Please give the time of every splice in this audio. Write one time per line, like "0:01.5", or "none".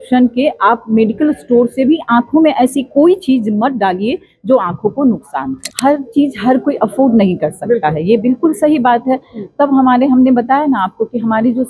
0:05.6